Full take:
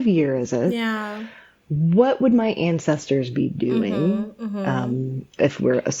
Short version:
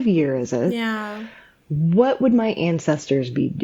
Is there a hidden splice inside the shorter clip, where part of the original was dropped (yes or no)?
no